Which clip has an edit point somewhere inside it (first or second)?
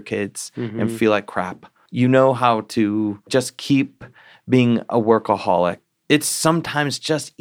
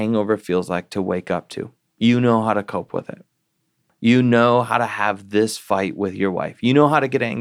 first